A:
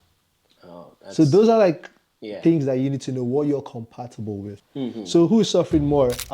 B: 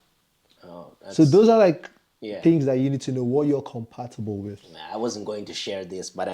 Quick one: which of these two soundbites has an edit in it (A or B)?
A